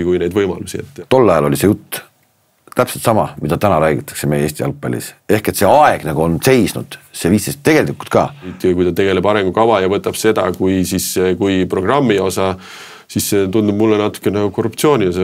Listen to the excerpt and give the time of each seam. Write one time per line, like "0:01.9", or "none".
0:00.9
0:08.6